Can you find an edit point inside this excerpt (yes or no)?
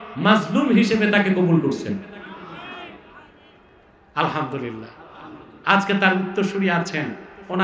no